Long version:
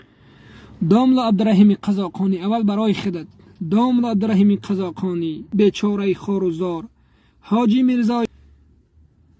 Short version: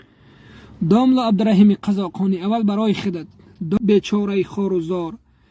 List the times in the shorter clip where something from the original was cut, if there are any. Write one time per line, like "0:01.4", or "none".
0:03.8